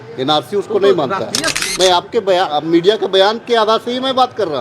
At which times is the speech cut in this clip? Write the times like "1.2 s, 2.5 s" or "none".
1.6 s